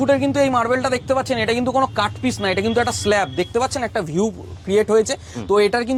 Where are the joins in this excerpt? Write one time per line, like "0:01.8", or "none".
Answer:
none